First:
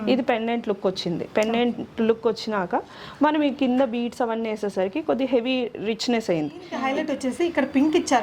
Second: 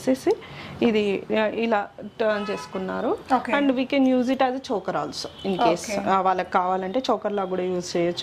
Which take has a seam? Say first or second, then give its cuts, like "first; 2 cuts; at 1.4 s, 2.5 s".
first; 1 cut; at 6.7 s